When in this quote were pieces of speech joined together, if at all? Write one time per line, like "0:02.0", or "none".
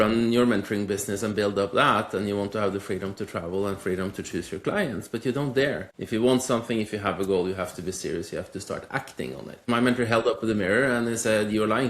0:05.9
0:09.6